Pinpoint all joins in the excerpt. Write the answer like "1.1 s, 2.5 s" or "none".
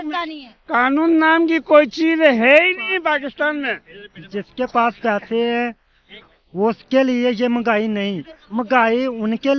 none